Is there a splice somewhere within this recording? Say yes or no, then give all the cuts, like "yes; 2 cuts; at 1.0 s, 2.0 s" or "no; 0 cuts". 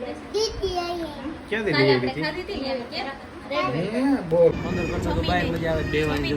yes; 1 cut; at 4.6 s